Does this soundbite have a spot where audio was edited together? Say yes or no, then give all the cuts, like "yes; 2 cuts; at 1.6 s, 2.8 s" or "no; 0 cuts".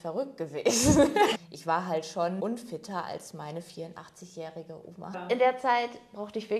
yes; 3 cuts; at 1.4 s, 2.4 s, 5.2 s